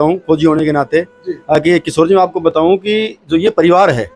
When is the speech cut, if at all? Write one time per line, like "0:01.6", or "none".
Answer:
none